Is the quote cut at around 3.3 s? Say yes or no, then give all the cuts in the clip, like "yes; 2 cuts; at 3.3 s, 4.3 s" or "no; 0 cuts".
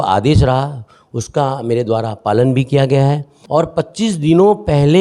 yes; 1 cut; at 3.3 s